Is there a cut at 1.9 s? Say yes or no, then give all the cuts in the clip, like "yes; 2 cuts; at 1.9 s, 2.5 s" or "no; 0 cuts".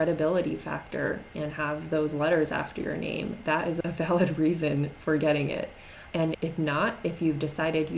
no; 2 cuts; at 3.8 s, 6.1 s